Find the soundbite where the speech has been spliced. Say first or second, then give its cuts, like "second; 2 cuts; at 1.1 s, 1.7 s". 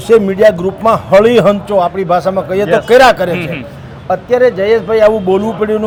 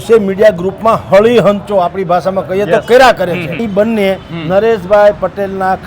second; 1 cut; at 3.6 s